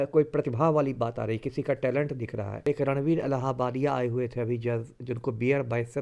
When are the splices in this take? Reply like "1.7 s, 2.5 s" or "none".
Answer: 2.7 s